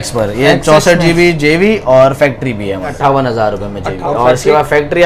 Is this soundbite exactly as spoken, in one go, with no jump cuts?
no; 2 cuts; at 2.9 s, 4.0 s

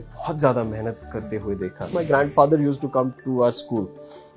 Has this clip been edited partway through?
yes; 1 cut; at 1.9 s

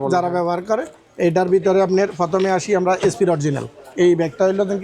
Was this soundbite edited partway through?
no; 0 cuts

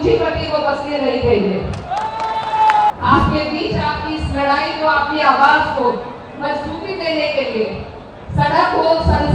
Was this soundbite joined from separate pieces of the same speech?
yes; 1 cut; at 2.9 s

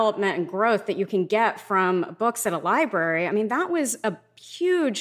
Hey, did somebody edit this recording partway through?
no; 0 cuts

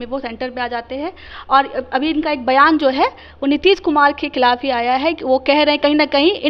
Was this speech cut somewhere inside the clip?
no; 0 cuts

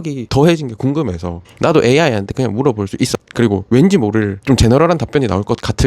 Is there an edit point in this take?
yes; 1 cut; at 3.2 s

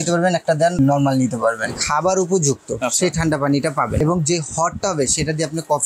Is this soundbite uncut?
no; 3 cuts; at 0.8 s, 1.8 s, 4.0 s

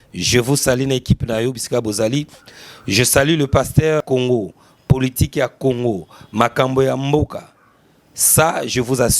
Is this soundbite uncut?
no; 1 cut; at 4.0 s

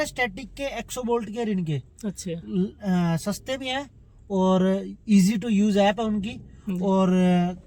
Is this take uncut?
yes; 0 cuts

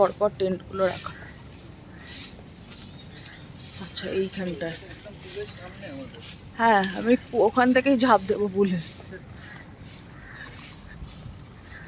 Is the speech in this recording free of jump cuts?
yes; 0 cuts

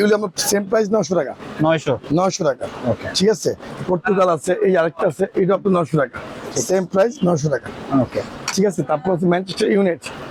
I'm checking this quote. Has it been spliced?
no; 0 cuts

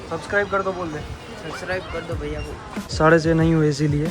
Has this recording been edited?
yes; 1 cut; at 2.9 s

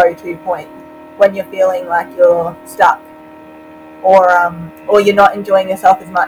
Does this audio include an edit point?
no; 0 cuts

